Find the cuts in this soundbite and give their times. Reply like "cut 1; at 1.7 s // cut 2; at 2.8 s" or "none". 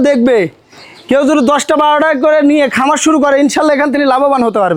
none